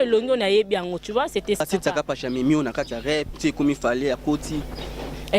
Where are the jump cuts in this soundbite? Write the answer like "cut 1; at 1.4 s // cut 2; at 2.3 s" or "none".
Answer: cut 1; at 1.6 s